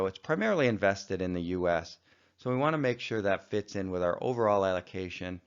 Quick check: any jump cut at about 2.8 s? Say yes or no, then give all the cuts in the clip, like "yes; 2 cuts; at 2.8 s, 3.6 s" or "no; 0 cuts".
yes; 1 cut; at 2.8 s